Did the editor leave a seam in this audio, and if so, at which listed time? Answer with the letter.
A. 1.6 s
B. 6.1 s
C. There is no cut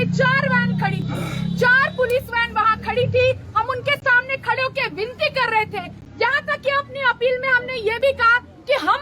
C